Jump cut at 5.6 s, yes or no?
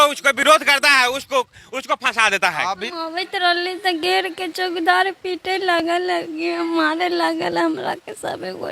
no